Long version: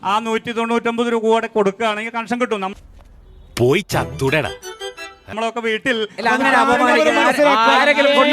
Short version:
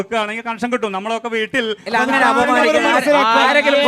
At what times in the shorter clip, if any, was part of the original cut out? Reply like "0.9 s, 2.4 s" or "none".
1.0 s